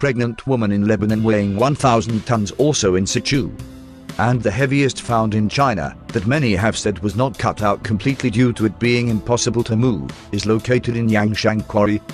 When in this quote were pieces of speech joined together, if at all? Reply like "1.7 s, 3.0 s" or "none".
4.5 s